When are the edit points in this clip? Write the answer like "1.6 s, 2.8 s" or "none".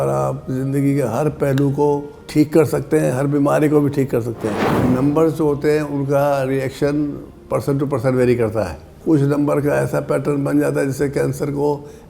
4.6 s, 8.8 s